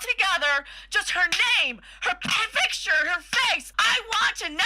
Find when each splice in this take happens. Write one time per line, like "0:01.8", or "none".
0:03.7